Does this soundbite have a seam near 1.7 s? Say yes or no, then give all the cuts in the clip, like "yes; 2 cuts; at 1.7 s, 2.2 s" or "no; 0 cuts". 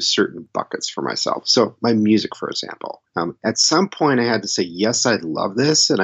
no; 1 cut; at 3.0 s